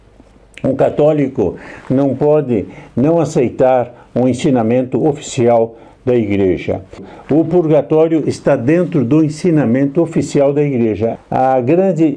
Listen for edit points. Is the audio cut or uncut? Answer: cut